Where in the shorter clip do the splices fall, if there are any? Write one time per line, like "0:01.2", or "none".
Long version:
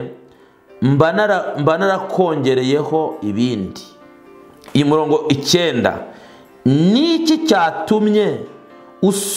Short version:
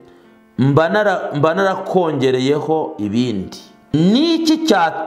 0:03.9